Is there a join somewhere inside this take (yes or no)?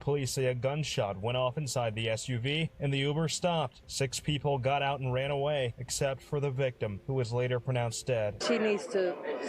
yes